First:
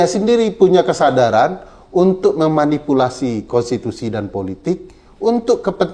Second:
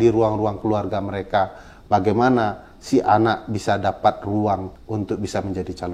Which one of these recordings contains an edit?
second; 1 cut; at 4.8 s

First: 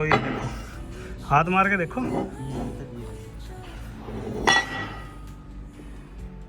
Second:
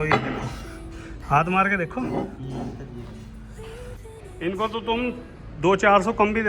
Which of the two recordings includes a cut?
second; 1 cut; at 3.9 s

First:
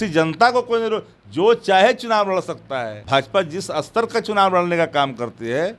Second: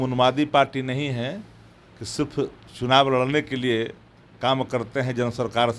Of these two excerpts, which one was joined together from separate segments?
first; 1 cut; at 3.0 s

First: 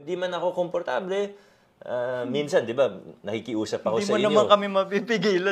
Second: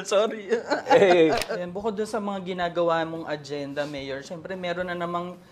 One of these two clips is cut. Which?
second; 1 cut; at 1.5 s

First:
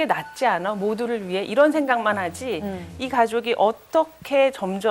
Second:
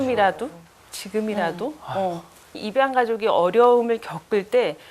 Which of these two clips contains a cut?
second; 1 cut; at 2.6 s

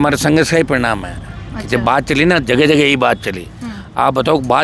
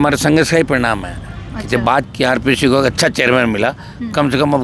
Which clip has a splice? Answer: second; 1 cut; at 1.8 s

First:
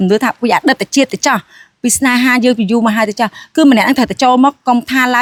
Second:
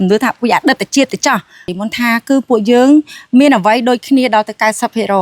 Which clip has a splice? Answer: second; 1 cut; at 1.7 s

